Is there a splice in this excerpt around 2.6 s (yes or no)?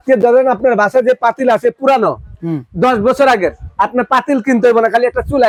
no